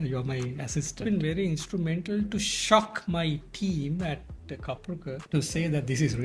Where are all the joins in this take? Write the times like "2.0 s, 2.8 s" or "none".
1.0 s, 5.2 s